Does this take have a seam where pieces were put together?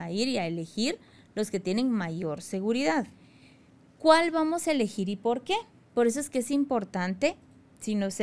yes; 1 cut; at 3.1 s

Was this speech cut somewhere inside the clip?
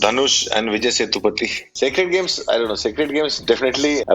yes; 1 cut; at 1.7 s

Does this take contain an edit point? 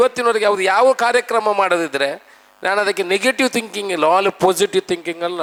no; 0 cuts

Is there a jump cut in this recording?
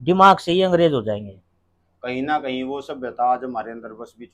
no; 0 cuts

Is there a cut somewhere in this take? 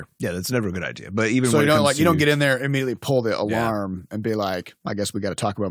yes; 1 cut; at 4.7 s

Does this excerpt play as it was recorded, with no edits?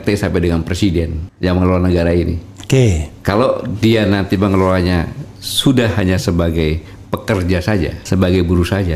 no; 2 cuts; at 1.2 s, 8.0 s

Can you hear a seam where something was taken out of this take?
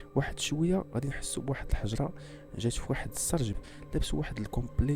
yes; 1 cut; at 3.7 s

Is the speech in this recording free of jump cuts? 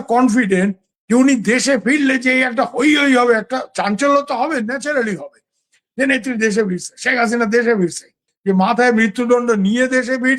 no; 1 cut; at 8.3 s

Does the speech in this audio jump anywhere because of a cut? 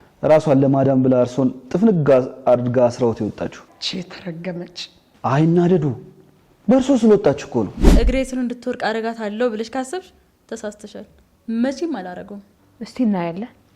yes; 1 cut; at 7.8 s

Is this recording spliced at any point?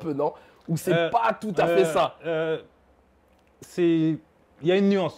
no; 0 cuts

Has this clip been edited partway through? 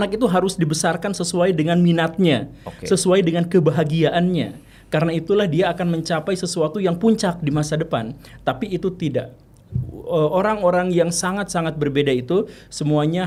no; 0 cuts

